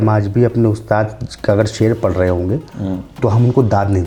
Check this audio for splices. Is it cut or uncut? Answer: uncut